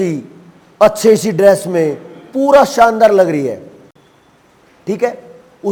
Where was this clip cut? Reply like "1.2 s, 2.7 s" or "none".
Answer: none